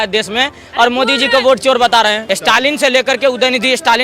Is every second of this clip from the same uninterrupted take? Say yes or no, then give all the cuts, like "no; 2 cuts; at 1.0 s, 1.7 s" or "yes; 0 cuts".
no; 1 cut; at 2.2 s